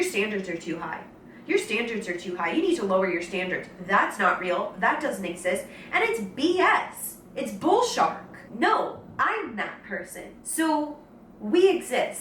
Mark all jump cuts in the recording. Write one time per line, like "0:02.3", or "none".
none